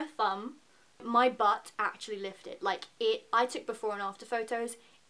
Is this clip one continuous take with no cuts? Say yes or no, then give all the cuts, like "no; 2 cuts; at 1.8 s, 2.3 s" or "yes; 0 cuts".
no; 1 cut; at 1.0 s